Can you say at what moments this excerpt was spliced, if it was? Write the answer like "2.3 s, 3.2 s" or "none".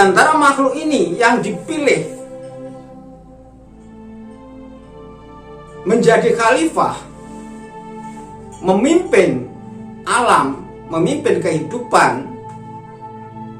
2.1 s, 3.4 s, 5.8 s, 7.1 s, 8.5 s, 12.4 s